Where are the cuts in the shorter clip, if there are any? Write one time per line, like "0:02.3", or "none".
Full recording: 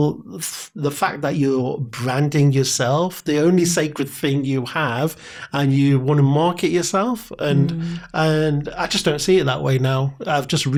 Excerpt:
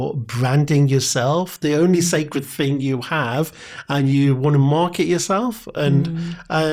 none